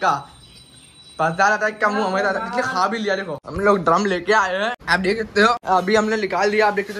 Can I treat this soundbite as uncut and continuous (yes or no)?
no